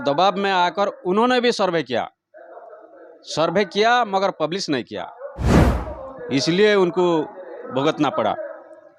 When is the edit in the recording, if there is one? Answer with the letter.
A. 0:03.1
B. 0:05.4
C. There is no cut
C